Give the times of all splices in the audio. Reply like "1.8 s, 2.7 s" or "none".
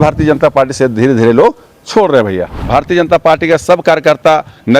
2.6 s